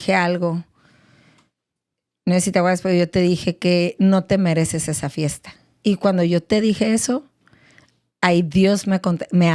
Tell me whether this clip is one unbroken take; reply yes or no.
no